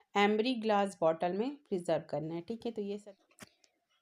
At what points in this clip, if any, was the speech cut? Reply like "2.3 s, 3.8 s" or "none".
3.0 s